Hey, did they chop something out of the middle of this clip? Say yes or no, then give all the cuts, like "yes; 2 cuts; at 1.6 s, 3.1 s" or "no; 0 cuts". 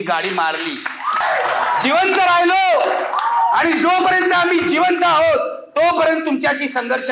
yes; 1 cut; at 1.2 s